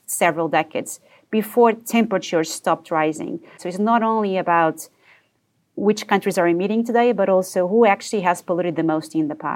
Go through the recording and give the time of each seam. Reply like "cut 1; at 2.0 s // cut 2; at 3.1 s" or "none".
cut 1; at 3.6 s // cut 2; at 5.8 s